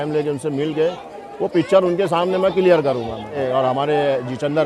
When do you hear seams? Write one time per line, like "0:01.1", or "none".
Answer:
0:03.4